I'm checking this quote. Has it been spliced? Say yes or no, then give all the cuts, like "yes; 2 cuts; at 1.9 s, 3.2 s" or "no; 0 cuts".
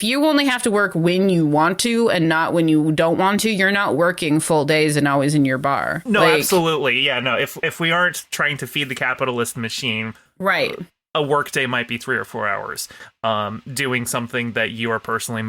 yes; 1 cut; at 7.6 s